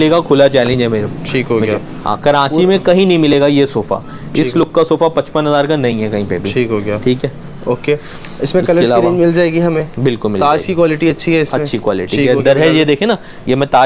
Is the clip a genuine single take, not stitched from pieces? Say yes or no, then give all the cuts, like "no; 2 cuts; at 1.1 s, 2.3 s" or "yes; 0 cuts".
yes; 0 cuts